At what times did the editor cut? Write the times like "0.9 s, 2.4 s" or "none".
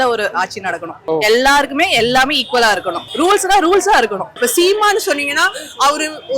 0.9 s, 3.0 s, 4.3 s